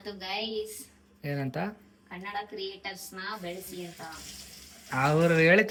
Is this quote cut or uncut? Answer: uncut